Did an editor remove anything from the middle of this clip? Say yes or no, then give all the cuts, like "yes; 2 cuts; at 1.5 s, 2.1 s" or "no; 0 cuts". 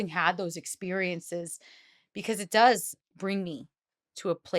yes; 1 cut; at 2.9 s